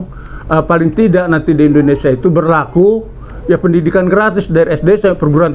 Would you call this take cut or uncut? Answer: uncut